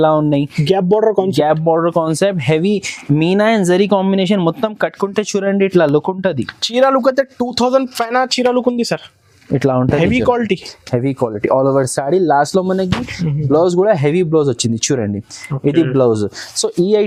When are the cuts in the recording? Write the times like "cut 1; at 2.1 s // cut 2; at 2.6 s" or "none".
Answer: none